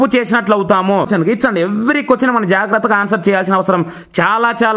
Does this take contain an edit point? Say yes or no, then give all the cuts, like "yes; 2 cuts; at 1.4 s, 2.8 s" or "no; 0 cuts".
yes; 1 cut; at 1.1 s